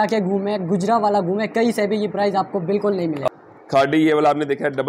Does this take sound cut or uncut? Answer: cut